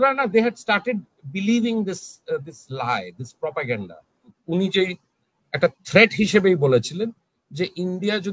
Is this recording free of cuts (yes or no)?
no